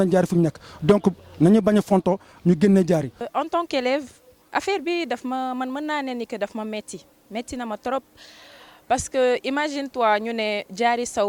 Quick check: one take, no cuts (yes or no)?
no